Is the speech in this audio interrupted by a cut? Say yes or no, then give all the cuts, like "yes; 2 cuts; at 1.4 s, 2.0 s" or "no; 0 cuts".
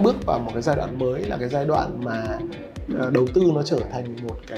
no; 0 cuts